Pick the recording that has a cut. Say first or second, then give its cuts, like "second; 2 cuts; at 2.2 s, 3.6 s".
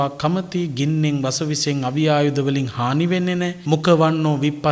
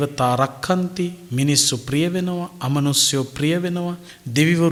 first; 1 cut; at 3.6 s